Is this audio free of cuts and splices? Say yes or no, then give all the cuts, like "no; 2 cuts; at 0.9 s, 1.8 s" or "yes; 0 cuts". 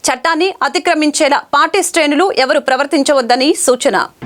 yes; 0 cuts